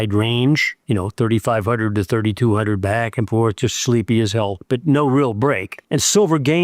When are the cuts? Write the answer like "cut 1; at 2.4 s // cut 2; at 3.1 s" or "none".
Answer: cut 1; at 4.6 s // cut 2; at 5.7 s